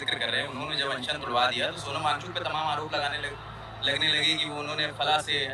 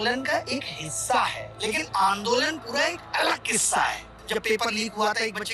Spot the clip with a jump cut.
second; 2 cuts; at 1.5 s, 4.1 s

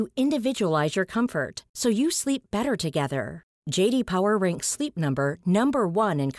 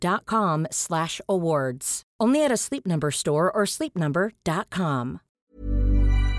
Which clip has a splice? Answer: second; 1 cut; at 5.3 s

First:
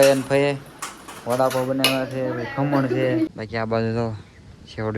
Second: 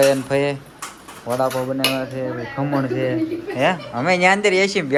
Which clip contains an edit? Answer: first; 1 cut; at 3.3 s

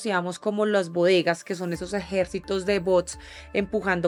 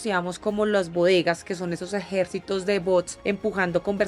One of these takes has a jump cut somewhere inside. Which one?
second; 1 cut; at 3.1 s

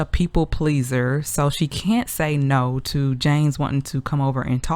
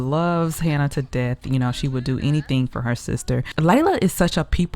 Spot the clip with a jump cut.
second; 1 cut; at 3.5 s

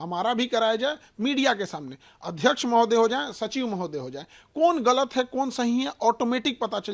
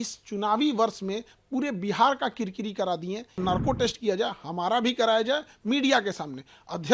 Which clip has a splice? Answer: second; 1 cut; at 3.4 s

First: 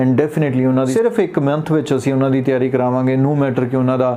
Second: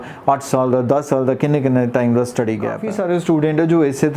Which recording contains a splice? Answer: second; 1 cut; at 2.8 s

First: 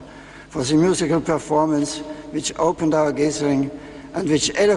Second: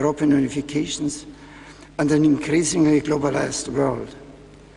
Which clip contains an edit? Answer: second; 1 cut; at 1.2 s

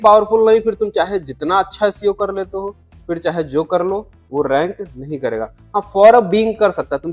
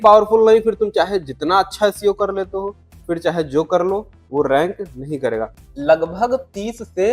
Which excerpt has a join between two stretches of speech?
second; 1 cut; at 5.6 s

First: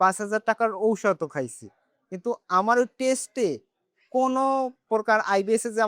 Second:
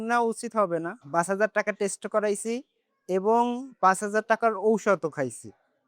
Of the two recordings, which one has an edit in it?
second; 1 cut; at 1.0 s

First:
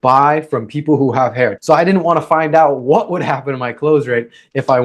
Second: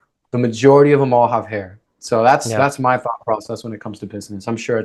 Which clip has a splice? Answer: first; 1 cut; at 1.6 s

